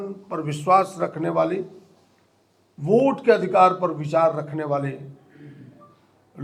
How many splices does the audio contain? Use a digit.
0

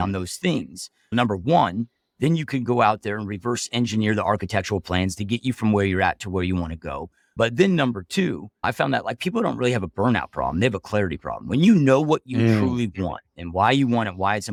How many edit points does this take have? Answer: 0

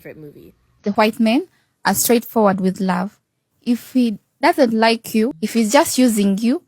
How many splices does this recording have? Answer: 2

